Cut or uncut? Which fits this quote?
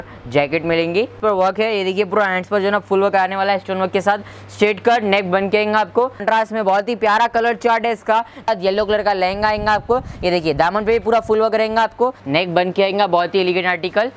cut